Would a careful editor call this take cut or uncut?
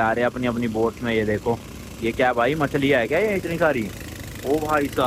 uncut